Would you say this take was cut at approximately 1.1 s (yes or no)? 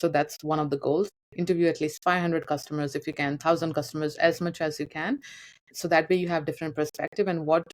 yes